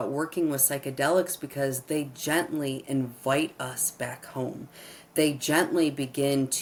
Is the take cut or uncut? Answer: uncut